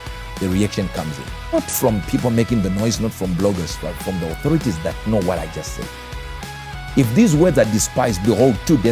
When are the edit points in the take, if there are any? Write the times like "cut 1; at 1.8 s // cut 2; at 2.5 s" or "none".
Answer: cut 1; at 1.5 s